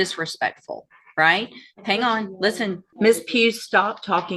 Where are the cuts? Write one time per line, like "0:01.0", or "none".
0:02.9